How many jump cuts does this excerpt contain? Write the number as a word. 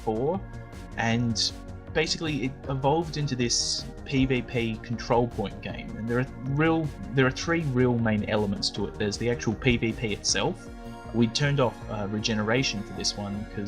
one